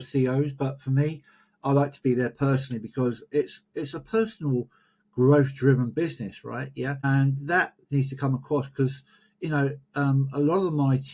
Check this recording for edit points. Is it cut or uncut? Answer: cut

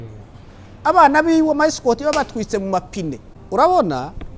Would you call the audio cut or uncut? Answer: cut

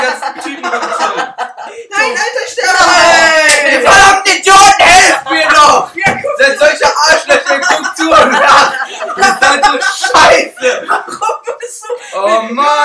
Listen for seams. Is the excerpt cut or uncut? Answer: uncut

